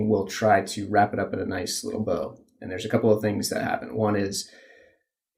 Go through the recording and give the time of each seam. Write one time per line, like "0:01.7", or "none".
none